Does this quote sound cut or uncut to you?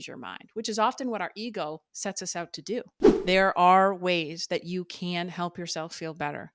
cut